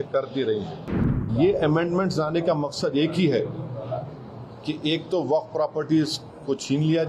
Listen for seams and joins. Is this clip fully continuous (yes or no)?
no